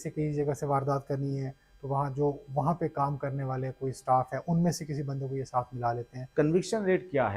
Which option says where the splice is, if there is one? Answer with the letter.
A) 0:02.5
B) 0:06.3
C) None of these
B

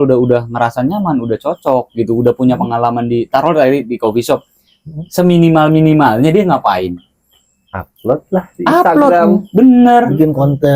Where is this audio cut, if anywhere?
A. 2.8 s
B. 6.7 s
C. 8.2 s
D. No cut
D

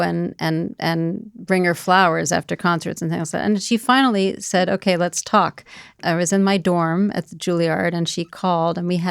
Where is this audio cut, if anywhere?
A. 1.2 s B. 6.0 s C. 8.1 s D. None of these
B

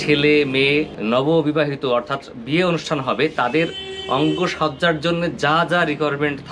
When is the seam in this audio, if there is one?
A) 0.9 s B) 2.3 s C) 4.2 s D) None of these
A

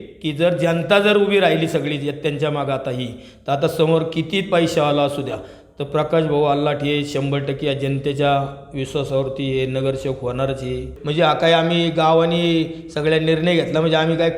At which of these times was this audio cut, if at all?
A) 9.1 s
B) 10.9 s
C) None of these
B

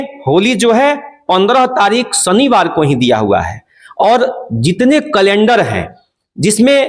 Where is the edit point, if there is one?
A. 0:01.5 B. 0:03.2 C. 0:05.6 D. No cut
D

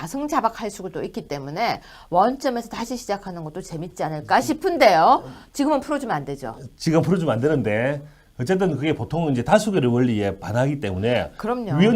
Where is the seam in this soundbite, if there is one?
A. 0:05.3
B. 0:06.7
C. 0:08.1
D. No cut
A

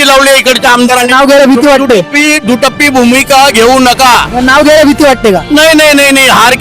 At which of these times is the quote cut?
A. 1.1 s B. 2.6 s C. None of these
A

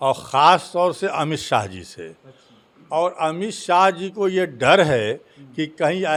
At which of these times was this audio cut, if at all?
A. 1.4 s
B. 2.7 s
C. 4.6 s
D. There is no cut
D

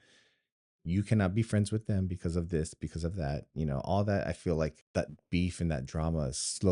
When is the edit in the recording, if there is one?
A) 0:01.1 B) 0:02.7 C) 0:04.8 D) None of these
C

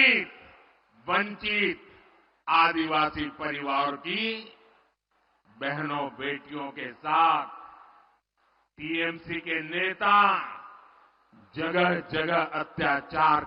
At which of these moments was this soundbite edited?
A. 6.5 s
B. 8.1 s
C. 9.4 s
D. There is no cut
D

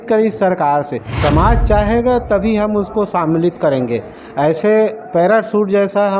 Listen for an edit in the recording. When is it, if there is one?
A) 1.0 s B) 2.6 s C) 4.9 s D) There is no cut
A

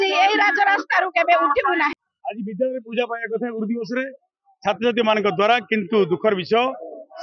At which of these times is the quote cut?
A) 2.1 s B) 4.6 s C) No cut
A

